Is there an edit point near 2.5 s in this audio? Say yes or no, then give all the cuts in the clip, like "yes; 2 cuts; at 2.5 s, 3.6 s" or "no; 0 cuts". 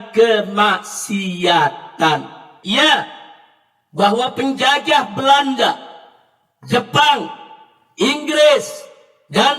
yes; 1 cut; at 2.5 s